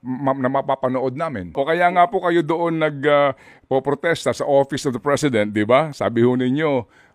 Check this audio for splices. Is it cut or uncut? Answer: cut